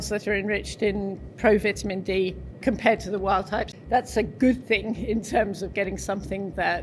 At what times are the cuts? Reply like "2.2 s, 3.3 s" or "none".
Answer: 2.5 s, 3.7 s

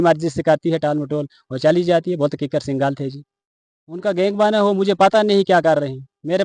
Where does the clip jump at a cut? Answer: none

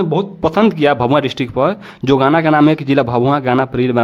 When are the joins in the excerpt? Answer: none

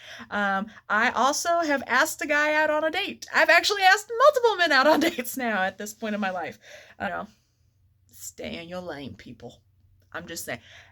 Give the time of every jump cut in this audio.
7.1 s

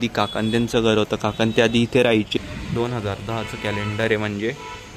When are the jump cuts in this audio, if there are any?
2.3 s

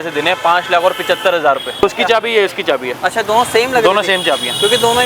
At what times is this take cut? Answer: 1.8 s

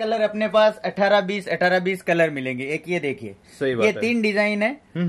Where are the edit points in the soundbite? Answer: none

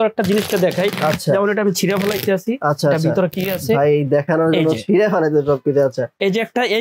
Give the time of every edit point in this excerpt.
none

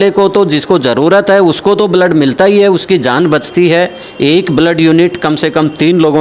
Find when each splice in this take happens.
none

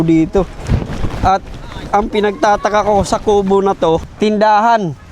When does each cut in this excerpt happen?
4.1 s

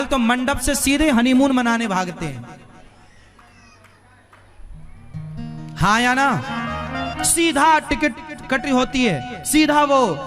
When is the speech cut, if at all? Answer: 2.9 s

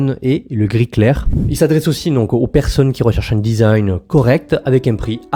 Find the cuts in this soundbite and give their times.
1.4 s

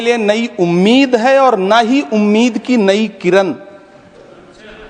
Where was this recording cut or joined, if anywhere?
none

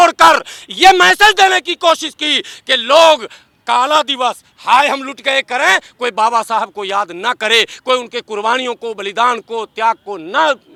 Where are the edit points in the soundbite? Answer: none

